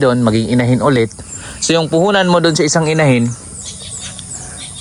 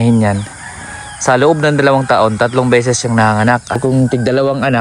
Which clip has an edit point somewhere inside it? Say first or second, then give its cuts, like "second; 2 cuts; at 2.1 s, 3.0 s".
second; 1 cut; at 3.8 s